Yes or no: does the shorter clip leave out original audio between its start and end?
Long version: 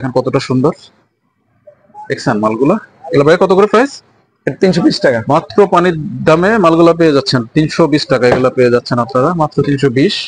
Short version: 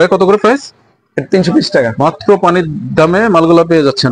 no